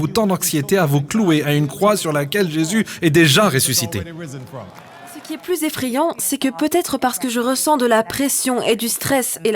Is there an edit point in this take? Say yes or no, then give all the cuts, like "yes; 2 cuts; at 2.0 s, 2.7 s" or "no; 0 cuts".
yes; 1 cut; at 5.3 s